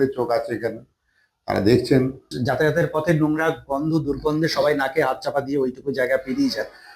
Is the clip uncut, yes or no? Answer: no